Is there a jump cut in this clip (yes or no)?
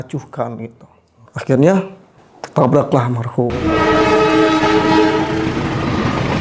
yes